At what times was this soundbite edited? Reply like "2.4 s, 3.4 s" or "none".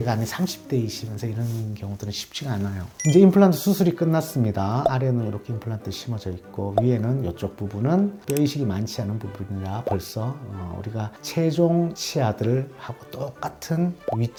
none